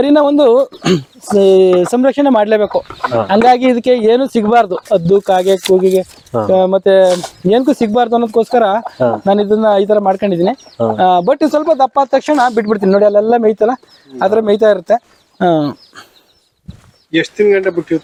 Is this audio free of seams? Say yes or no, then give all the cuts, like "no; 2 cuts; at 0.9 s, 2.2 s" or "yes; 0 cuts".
yes; 0 cuts